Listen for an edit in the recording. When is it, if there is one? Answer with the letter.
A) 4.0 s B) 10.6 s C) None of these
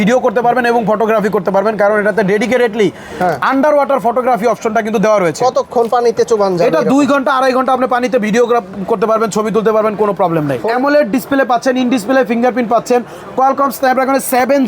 B